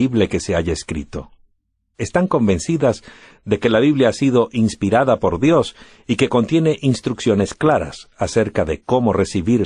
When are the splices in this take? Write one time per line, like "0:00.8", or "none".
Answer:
none